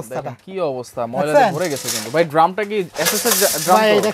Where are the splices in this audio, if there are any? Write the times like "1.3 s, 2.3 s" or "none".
none